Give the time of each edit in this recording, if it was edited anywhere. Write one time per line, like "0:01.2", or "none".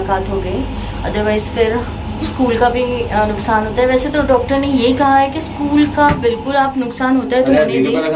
none